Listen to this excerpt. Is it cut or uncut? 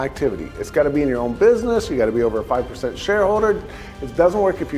uncut